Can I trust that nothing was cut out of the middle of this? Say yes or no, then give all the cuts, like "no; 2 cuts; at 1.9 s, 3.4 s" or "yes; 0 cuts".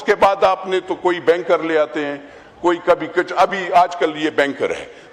yes; 0 cuts